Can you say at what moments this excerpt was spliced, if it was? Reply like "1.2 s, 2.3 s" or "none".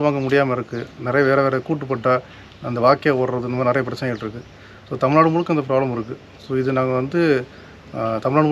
none